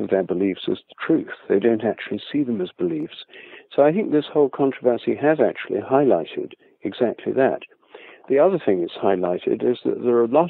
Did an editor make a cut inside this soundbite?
no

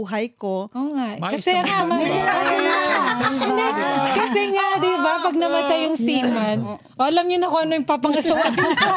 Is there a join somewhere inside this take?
no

